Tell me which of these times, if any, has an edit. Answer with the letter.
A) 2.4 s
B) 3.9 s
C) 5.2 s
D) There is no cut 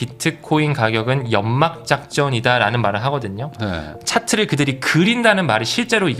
B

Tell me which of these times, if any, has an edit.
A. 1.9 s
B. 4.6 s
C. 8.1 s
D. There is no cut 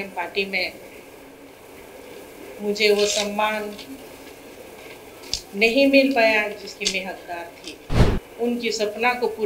C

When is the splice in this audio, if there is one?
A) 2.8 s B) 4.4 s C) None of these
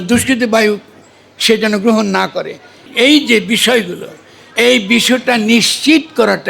A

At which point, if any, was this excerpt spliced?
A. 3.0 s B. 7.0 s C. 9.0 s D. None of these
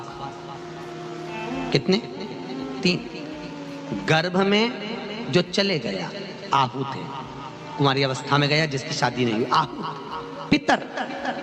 B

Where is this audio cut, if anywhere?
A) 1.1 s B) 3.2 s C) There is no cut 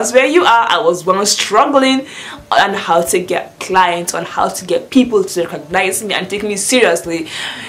A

